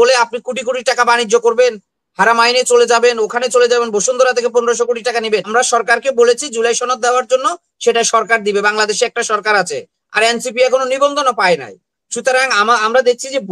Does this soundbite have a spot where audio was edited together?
yes; 1 cut; at 5.5 s

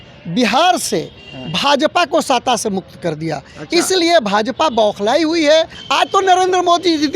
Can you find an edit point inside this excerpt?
yes; 1 cut; at 5.8 s

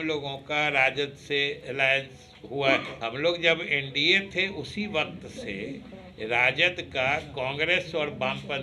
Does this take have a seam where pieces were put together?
yes; 1 cut; at 2.9 s

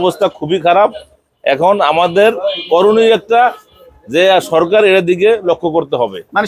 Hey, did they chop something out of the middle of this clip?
no; 0 cuts

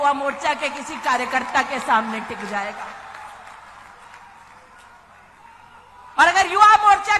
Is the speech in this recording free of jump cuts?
yes; 0 cuts

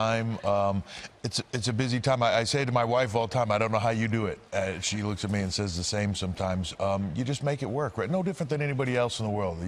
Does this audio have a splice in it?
no; 0 cuts

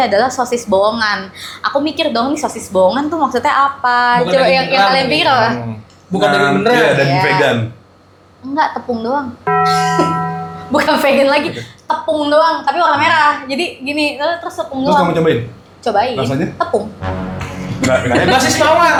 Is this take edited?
no; 0 cuts

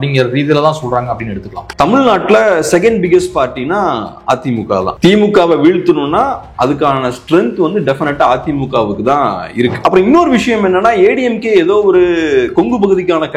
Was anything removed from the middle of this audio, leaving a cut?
yes; 2 cuts; at 1.7 s, 9.8 s

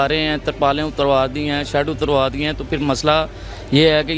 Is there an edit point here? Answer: no; 0 cuts

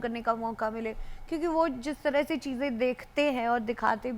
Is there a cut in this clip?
no; 0 cuts

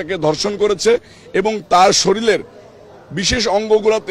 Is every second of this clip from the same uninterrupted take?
yes; 0 cuts

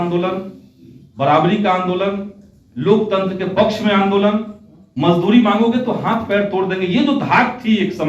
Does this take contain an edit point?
yes; 1 cut; at 4.8 s

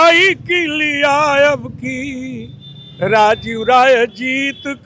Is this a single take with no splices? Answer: yes; 0 cuts

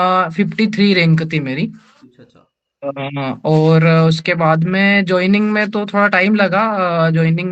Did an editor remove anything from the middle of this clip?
no; 0 cuts

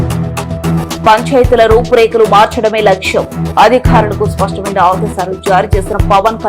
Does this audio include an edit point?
yes; 1 cut; at 1.0 s

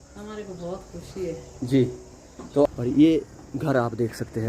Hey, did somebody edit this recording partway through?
yes; 1 cut; at 2.7 s

